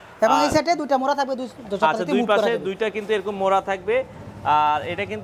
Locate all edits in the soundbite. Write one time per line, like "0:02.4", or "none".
none